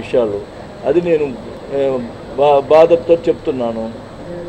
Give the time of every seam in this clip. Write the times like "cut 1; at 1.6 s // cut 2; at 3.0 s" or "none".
none